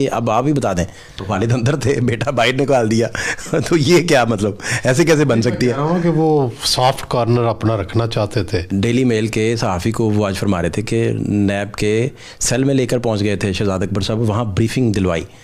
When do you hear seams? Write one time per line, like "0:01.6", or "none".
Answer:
0:01.1
0:08.7